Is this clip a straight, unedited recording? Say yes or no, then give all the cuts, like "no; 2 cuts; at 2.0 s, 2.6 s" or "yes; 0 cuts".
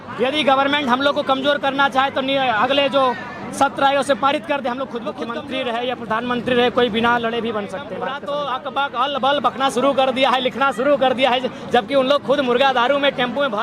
no; 2 cuts; at 5.3 s, 7.8 s